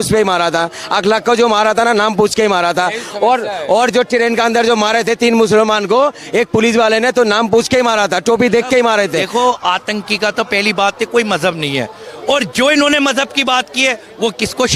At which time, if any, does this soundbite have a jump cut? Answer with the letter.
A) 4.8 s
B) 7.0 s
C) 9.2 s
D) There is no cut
C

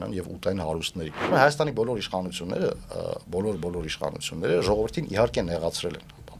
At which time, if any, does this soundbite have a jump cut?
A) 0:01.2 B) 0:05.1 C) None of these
A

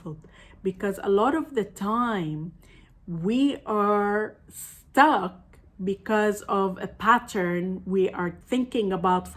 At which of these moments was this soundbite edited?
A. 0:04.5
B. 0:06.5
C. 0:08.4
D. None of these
C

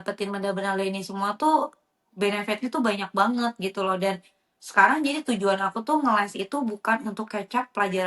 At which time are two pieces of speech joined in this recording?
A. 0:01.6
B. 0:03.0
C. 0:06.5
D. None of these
D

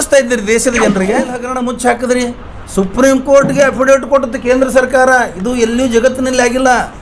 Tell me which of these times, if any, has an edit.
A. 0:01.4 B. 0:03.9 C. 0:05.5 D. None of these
A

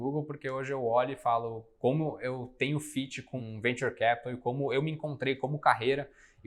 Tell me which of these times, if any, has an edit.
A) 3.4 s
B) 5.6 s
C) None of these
A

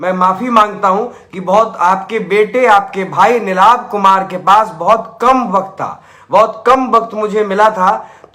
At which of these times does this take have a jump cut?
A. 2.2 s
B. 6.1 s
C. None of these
C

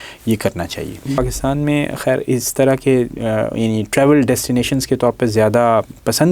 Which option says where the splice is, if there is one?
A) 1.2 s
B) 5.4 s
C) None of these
A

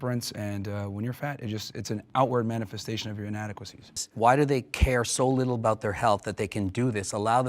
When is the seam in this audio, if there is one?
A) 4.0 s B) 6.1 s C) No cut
A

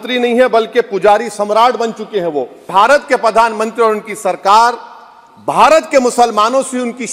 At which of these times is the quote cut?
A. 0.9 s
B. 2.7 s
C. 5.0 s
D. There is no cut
B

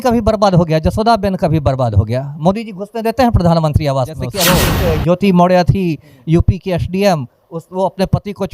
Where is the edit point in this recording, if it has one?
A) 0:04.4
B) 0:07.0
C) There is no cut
A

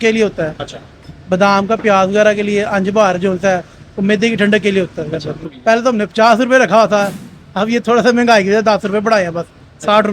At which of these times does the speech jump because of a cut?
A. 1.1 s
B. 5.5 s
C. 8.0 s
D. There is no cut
B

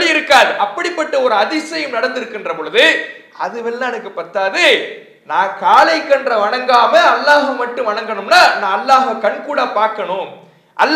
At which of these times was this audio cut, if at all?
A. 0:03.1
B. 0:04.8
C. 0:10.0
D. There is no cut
D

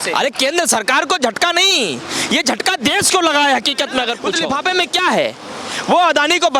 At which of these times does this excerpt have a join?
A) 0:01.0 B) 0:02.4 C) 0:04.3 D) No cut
C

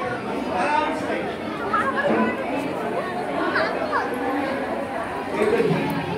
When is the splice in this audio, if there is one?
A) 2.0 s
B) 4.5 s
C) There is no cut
C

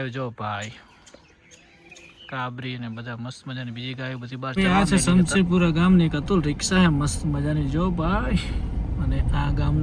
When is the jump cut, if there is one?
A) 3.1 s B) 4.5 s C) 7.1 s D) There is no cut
B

